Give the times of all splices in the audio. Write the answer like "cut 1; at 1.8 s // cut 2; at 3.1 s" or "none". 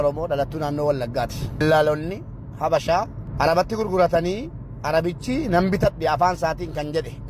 cut 1; at 1.6 s // cut 2; at 3.2 s